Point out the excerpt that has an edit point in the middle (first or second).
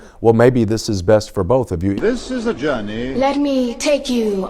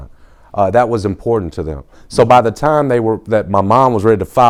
first